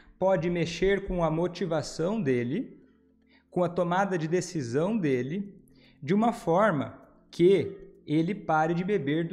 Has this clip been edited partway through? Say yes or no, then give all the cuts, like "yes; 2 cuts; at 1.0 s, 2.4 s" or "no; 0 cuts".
no; 0 cuts